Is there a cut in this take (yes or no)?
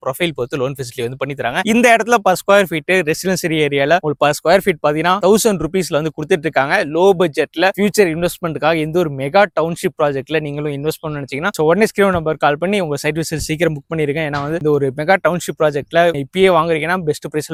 no